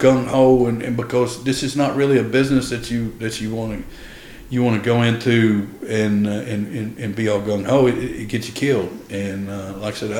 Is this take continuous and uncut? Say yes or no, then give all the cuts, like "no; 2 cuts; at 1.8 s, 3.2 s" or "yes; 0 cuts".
yes; 0 cuts